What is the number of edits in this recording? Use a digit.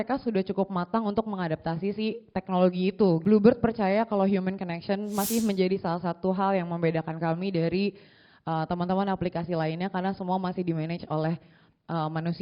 1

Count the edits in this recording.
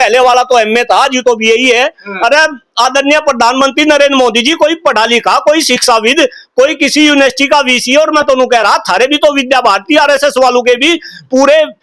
0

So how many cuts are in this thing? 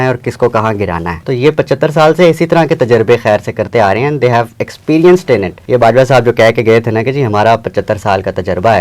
2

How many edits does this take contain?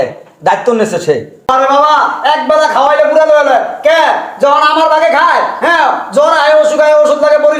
1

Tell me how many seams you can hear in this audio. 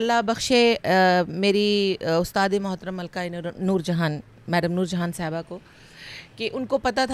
0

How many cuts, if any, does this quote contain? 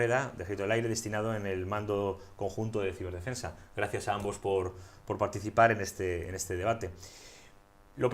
1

